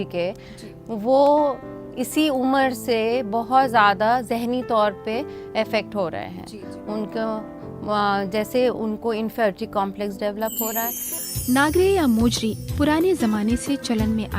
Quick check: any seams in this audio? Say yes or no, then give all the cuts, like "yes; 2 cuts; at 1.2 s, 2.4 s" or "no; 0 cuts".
yes; 1 cut; at 11.1 s